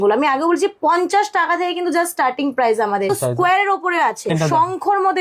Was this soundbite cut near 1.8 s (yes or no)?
no